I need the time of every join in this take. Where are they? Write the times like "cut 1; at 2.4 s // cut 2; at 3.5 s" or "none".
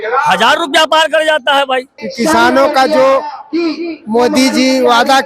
cut 1; at 2.0 s